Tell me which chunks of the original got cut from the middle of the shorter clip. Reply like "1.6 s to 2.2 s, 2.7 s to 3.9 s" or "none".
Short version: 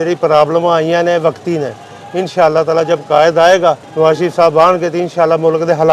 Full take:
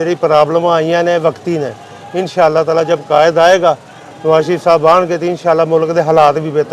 3.9 s to 4.1 s